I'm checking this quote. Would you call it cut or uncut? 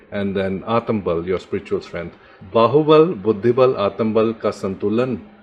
uncut